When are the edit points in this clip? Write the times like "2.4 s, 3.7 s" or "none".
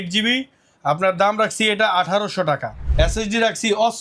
2.7 s